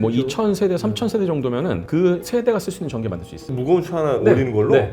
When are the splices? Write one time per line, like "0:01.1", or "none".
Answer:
none